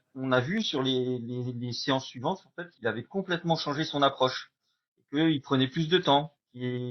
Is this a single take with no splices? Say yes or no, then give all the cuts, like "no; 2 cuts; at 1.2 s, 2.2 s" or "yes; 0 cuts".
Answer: yes; 0 cuts